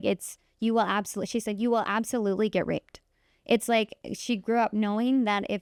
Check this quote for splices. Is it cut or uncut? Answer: uncut